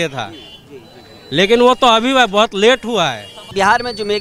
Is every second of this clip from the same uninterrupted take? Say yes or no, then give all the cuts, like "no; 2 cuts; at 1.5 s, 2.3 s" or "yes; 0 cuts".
yes; 0 cuts